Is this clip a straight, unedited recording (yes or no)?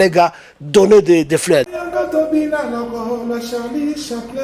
no